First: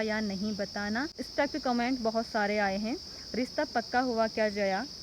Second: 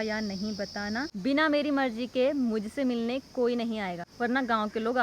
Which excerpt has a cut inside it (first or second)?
second